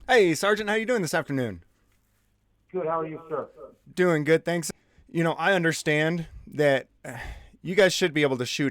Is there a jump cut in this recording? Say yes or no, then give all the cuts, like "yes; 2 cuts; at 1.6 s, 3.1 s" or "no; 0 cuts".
yes; 1 cut; at 4.6 s